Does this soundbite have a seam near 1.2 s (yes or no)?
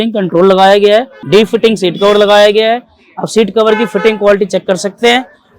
yes